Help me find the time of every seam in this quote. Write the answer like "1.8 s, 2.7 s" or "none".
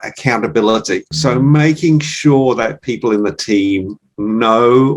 1.1 s